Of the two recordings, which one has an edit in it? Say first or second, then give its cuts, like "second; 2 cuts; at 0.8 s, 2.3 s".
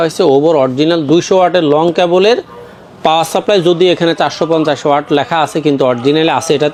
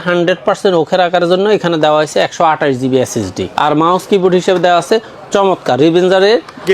second; 1 cut; at 3.4 s